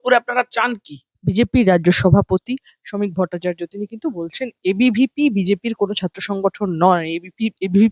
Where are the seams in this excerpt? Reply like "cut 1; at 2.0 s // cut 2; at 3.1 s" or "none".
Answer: cut 1; at 1.1 s